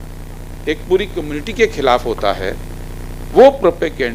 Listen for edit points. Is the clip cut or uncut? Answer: uncut